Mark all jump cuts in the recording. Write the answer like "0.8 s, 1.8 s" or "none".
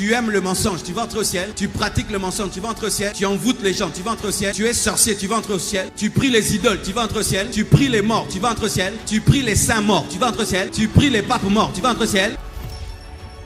1.5 s, 3.1 s, 4.5 s, 5.9 s, 7.5 s, 9.0 s, 10.7 s